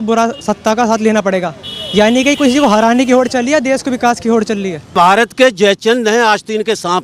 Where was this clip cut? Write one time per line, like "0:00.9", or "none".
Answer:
0:04.9